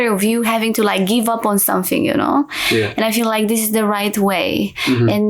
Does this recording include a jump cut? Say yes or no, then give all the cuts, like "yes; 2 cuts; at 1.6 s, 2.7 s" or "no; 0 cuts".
no; 0 cuts